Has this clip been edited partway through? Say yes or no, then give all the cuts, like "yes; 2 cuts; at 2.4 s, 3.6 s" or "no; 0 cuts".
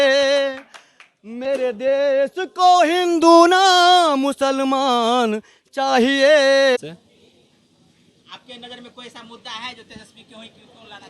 yes; 1 cut; at 6.8 s